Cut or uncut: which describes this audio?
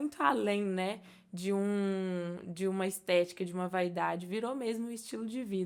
uncut